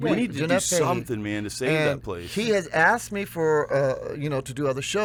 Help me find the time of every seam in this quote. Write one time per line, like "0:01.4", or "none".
none